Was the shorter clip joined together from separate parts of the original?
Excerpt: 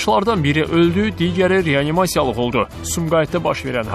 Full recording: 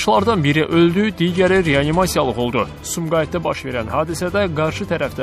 no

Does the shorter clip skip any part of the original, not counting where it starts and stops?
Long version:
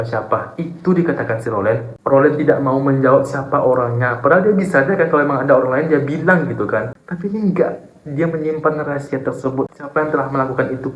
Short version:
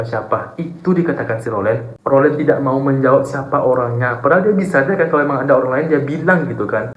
no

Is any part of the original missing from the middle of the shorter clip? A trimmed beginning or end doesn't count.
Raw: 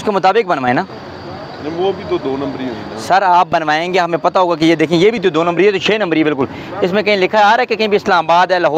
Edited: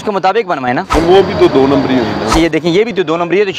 yes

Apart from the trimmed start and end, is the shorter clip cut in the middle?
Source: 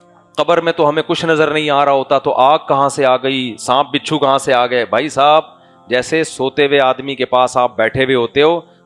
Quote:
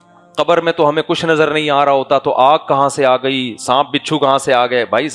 no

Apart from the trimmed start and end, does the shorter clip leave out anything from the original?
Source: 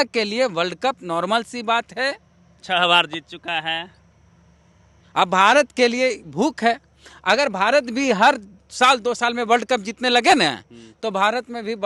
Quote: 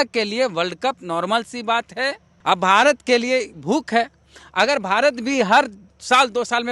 yes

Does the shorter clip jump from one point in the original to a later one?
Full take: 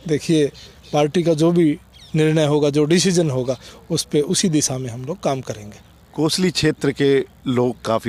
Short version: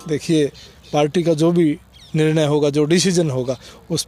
no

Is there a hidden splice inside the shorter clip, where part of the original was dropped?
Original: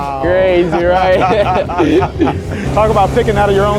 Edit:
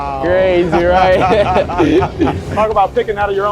yes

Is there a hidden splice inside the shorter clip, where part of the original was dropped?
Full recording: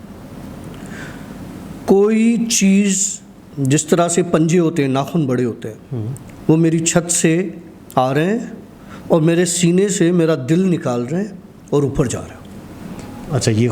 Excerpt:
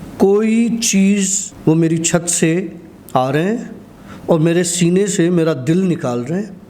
yes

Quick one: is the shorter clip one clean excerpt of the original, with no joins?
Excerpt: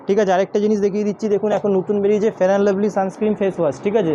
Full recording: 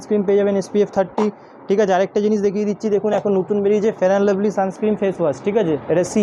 yes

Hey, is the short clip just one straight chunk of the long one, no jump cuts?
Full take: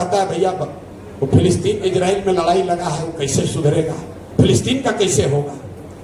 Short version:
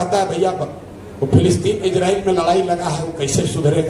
yes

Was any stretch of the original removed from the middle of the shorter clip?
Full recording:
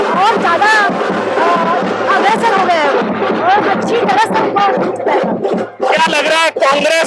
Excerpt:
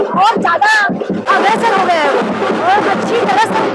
yes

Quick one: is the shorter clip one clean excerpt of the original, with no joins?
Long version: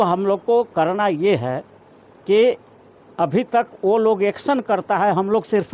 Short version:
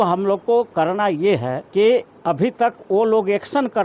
no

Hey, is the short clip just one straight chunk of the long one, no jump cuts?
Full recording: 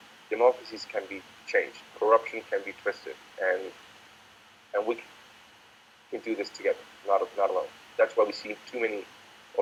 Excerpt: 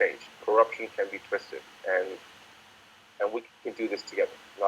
no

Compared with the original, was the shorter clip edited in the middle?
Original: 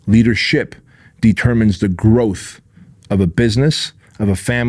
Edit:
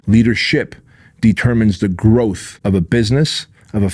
yes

